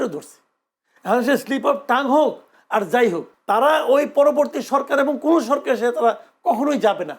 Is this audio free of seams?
no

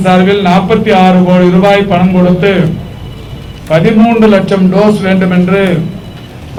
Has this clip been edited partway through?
no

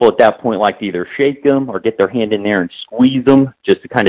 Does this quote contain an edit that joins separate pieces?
no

